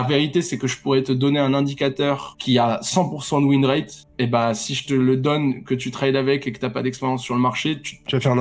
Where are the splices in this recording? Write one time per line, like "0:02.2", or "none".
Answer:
0:02.3